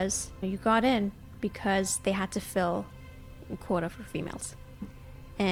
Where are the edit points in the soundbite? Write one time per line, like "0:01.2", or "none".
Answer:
none